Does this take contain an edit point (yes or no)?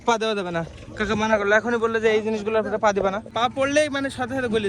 yes